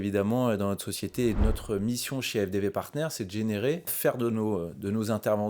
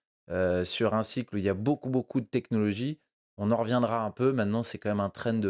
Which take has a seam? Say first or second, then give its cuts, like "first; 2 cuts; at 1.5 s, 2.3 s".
first; 2 cuts; at 1.4 s, 3.9 s